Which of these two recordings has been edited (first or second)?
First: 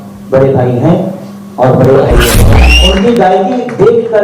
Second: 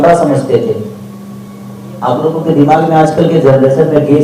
first